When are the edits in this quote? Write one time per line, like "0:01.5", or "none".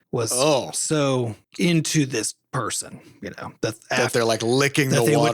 none